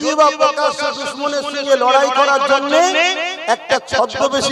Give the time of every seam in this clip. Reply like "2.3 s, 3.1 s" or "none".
none